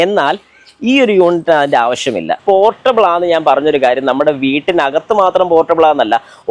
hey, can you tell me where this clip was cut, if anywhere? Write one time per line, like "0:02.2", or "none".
0:02.4